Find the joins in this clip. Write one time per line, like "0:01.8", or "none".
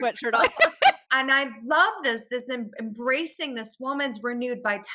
0:01.0